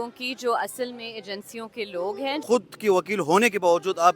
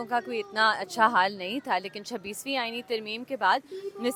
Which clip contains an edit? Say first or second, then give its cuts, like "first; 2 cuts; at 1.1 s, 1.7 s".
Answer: first; 1 cut; at 2.4 s